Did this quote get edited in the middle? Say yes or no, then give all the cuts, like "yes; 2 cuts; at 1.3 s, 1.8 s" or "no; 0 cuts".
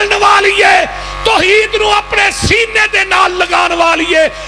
no; 0 cuts